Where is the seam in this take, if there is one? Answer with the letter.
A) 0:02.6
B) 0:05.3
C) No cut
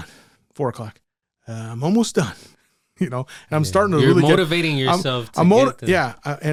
C